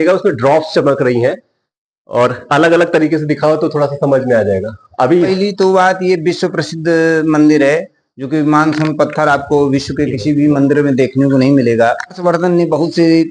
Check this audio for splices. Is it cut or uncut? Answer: cut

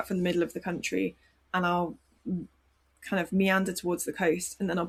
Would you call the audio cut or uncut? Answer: uncut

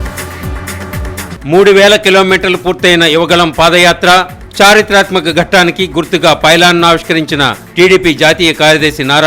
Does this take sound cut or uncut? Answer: cut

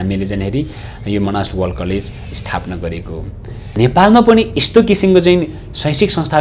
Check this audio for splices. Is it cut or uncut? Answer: cut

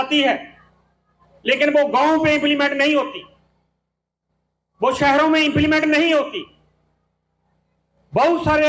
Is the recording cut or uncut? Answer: uncut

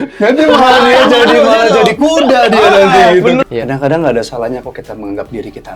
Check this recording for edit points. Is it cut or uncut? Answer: cut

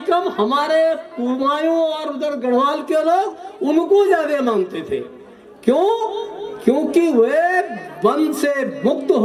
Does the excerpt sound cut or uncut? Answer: uncut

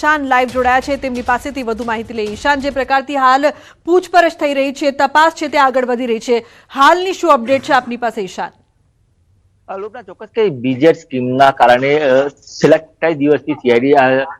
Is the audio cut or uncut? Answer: uncut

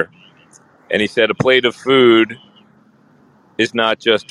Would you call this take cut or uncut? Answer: uncut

